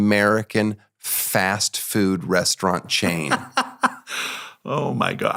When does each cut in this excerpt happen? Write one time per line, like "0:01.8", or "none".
none